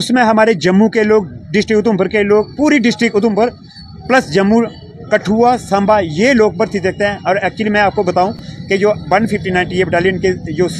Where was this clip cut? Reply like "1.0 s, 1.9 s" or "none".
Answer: none